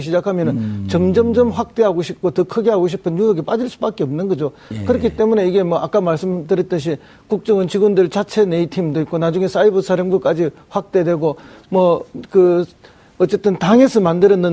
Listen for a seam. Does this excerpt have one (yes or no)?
yes